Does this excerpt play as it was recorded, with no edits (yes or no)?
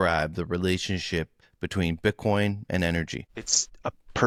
yes